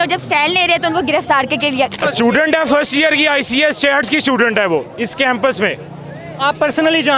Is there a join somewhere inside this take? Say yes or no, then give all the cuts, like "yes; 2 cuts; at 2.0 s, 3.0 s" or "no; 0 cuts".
yes; 1 cut; at 2.0 s